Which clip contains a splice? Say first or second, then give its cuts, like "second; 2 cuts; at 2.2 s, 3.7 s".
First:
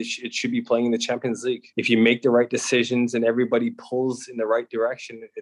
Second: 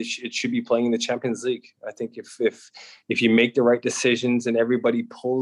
first; 1 cut; at 1.7 s